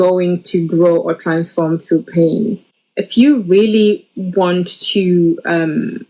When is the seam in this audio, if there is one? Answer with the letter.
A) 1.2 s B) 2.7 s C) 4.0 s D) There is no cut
B